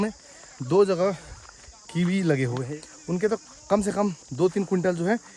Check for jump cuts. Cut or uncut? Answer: cut